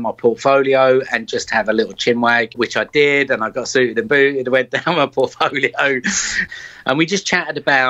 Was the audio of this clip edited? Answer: yes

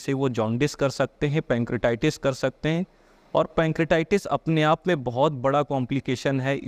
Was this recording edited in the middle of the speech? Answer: no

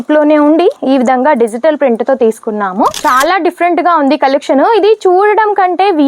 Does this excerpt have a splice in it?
yes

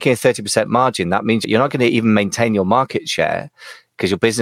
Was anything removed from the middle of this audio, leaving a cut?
yes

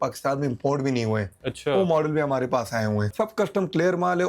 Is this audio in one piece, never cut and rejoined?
no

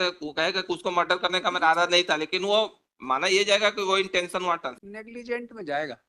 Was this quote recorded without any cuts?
no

